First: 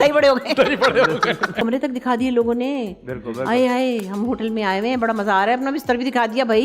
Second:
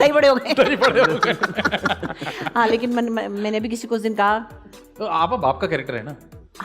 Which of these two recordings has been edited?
first; 1 cut; at 1.6 s

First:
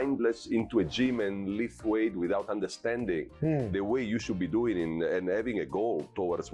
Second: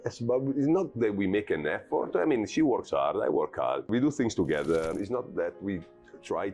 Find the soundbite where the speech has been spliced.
second; 2 cuts; at 3.9 s, 4.9 s

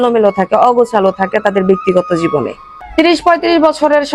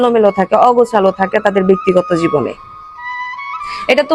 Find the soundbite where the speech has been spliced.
first; 1 cut; at 3.0 s

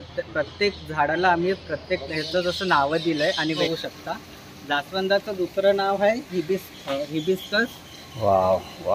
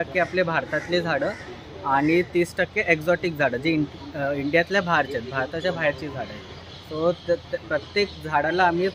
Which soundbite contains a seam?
first; 1 cut; at 3.6 s

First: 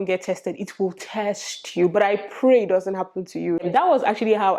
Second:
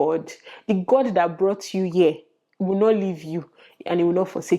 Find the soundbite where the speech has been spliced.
first; 1 cut; at 3.7 s

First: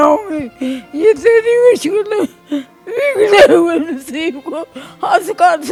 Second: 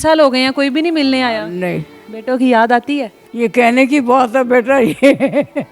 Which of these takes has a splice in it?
second; 2 cuts; at 2.1 s, 3.2 s

